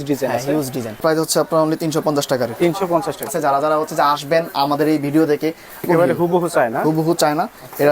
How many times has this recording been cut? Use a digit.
3